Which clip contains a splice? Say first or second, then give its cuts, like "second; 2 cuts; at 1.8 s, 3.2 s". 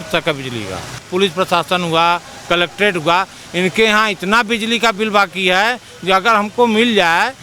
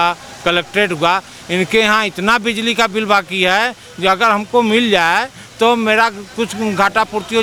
first; 1 cut; at 1.0 s